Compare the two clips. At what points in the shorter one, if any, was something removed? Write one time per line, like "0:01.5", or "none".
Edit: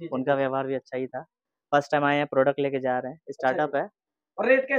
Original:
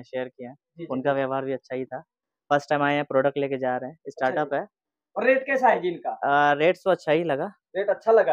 none